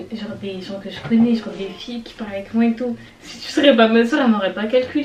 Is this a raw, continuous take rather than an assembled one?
yes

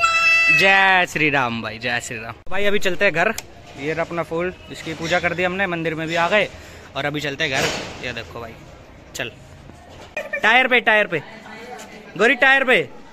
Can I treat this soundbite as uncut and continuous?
yes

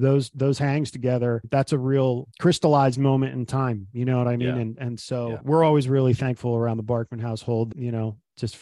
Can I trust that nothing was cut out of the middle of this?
yes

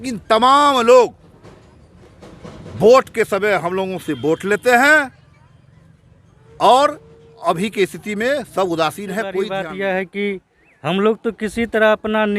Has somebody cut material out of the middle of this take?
yes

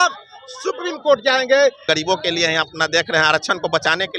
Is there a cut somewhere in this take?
yes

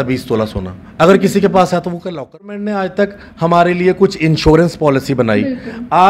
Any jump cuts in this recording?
yes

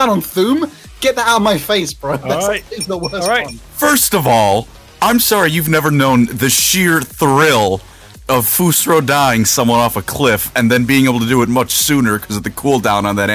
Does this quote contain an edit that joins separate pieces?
yes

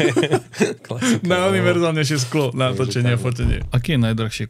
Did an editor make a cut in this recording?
yes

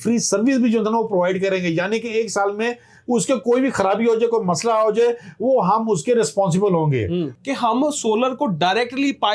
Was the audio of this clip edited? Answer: yes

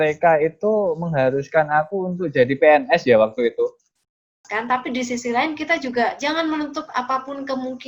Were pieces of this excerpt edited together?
yes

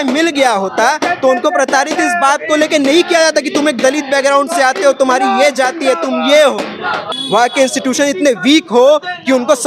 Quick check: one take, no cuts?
no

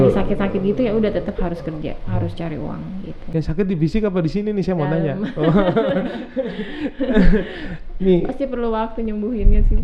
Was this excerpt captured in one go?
yes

